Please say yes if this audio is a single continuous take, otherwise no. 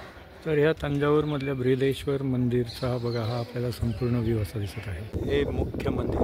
no